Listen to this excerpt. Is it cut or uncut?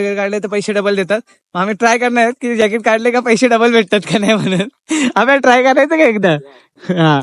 uncut